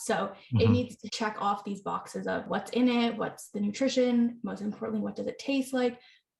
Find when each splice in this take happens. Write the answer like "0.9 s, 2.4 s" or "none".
1.0 s, 2.5 s, 3.2 s